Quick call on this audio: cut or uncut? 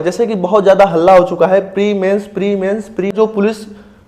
cut